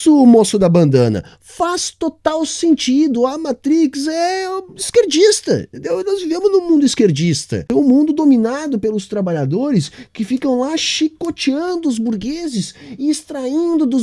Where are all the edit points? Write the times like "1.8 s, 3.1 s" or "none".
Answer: 7.7 s